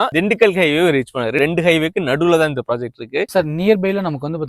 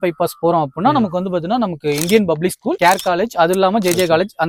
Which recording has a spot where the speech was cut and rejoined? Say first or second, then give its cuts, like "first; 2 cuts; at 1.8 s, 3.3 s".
first; 2 cuts; at 1.4 s, 3.3 s